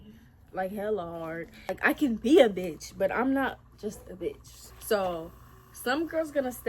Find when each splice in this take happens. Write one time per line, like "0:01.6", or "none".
0:01.7
0:04.5